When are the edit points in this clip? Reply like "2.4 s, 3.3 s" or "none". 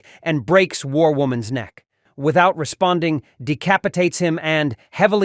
2.1 s